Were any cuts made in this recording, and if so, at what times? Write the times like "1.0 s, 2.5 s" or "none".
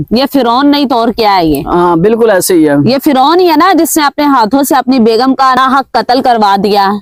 none

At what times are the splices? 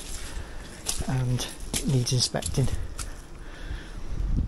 none

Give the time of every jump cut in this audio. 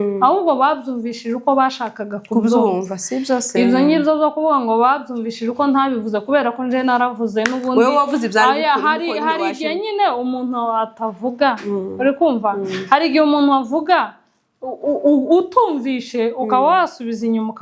none

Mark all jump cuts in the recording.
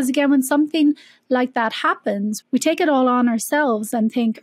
2.4 s

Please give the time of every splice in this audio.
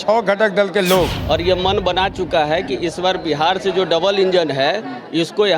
1.2 s

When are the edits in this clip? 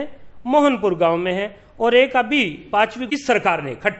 3.0 s

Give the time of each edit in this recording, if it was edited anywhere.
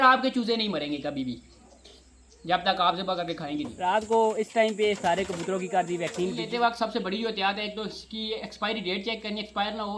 3.7 s, 6.4 s

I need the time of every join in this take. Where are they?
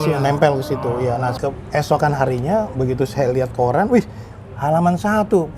1.3 s

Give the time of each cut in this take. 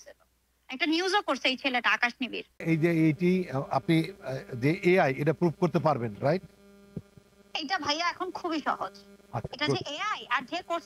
2.6 s

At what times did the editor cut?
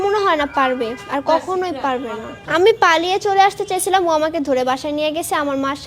2.2 s

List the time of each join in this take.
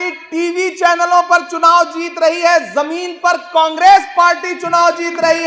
none

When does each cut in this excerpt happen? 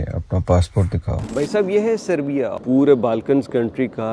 1.2 s, 2.6 s

